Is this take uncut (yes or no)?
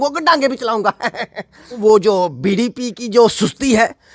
no